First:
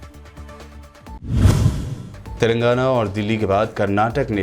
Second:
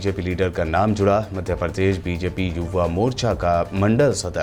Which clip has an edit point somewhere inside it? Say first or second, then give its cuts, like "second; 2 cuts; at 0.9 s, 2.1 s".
first; 1 cut; at 1.1 s